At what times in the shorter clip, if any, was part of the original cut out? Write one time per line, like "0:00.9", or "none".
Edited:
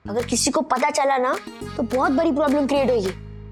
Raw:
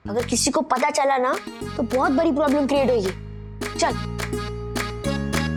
none